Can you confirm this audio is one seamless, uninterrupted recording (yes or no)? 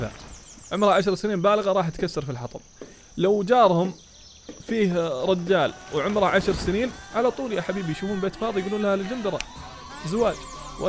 no